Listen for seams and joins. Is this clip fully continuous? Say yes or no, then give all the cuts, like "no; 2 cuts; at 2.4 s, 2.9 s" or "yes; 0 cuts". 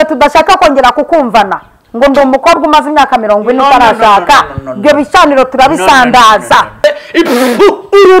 no; 1 cut; at 6.8 s